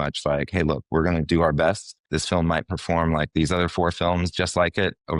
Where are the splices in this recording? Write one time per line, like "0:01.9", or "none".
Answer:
none